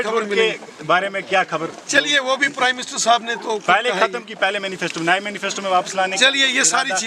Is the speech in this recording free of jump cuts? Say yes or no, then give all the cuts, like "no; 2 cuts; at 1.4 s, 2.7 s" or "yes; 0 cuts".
yes; 0 cuts